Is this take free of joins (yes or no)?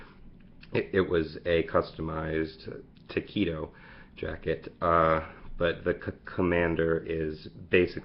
no